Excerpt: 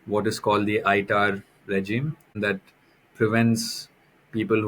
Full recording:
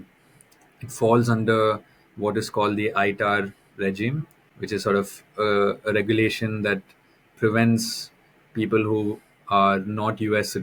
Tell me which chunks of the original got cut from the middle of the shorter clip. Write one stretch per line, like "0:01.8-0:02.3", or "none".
0:04.4-0:06.6